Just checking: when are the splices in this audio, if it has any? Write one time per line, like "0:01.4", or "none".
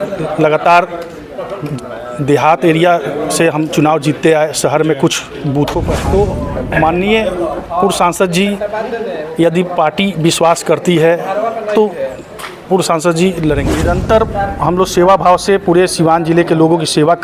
0:05.9
0:13.7